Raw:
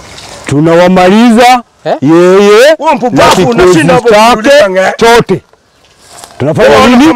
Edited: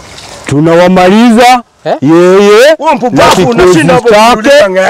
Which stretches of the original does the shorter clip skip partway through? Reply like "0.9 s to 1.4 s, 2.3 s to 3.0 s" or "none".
none